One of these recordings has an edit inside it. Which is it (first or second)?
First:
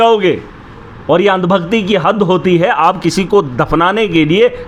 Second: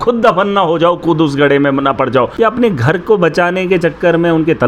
second